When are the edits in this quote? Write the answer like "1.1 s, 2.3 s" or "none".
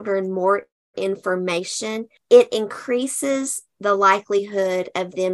2.1 s